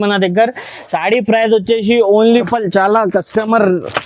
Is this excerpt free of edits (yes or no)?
no